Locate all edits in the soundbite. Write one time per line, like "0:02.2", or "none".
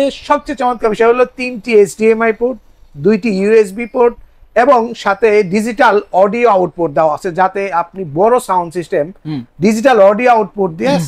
none